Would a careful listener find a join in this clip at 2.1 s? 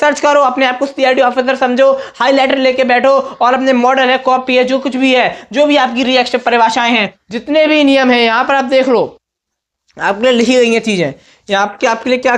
no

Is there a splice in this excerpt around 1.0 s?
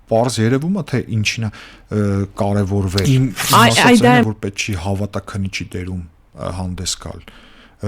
no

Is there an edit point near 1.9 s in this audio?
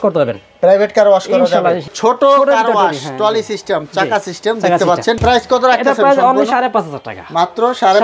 yes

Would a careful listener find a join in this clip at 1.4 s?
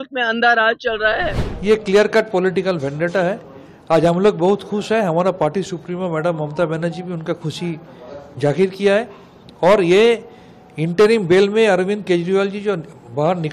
yes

